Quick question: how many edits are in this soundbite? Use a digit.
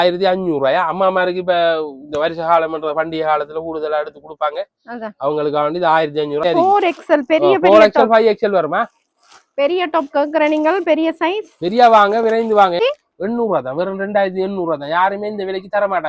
2